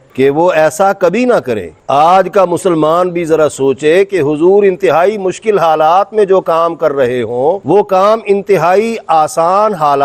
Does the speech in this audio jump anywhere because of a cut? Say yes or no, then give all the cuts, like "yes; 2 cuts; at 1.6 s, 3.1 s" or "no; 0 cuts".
yes; 1 cut; at 1.6 s